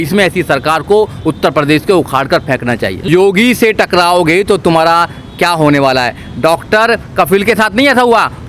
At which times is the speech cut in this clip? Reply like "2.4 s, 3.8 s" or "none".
2.9 s